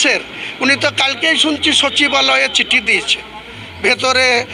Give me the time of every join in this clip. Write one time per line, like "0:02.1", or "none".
none